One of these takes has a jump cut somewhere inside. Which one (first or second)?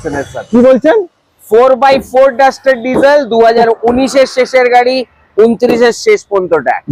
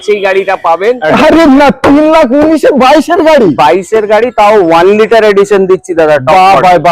second